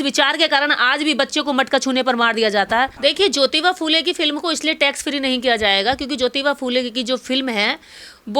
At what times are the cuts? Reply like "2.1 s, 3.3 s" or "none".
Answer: 2.9 s